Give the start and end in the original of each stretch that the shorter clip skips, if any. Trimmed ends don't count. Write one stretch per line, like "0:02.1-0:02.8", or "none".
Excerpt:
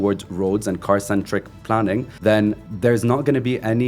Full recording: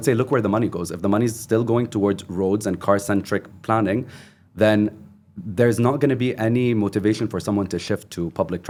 0:04.1-0:04.5
0:05.0-0:05.4